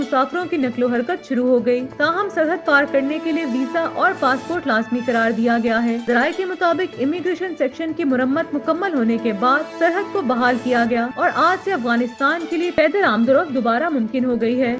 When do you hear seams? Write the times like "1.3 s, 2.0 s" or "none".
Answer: none